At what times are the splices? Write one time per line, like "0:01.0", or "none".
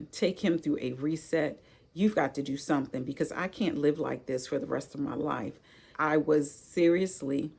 0:05.9